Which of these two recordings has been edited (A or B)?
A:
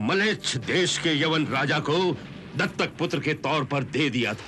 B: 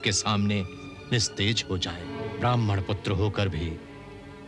B